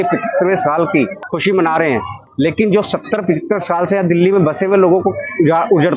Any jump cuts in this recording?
yes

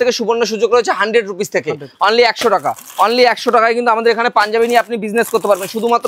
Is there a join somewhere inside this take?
no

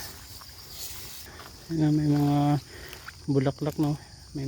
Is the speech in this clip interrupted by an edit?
yes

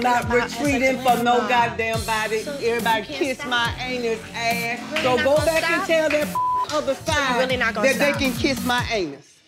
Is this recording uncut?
yes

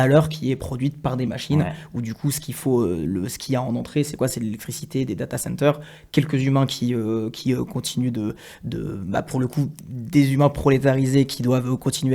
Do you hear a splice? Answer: no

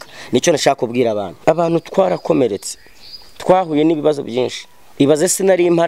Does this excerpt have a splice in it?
yes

